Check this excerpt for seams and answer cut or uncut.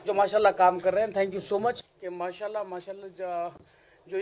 cut